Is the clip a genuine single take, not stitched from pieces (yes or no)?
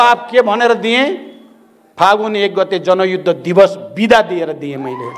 yes